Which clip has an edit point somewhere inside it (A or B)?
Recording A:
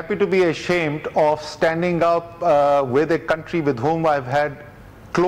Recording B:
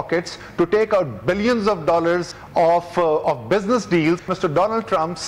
B